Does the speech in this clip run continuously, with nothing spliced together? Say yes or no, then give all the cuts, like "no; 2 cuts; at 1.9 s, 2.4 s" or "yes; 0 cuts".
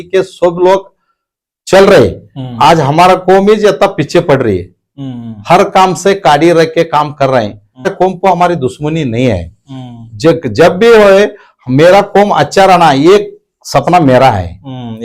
no; 1 cut; at 7.9 s